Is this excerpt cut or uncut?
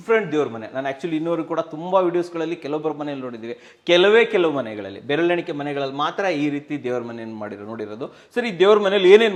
uncut